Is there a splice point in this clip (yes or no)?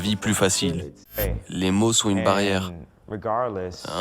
yes